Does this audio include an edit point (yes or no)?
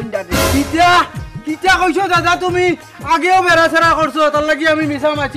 no